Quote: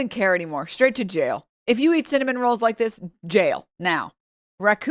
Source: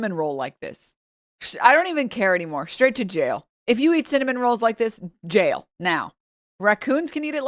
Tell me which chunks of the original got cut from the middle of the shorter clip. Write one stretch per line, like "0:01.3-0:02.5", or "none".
none